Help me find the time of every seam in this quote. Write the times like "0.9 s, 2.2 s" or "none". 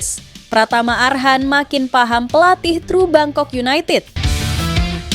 4.1 s